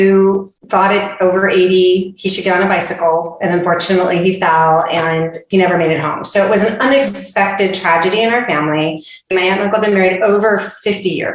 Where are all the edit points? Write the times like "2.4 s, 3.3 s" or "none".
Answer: 9.3 s